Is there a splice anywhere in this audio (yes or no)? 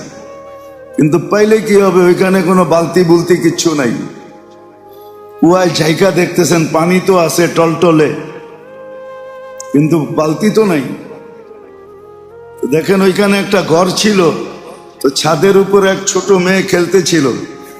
yes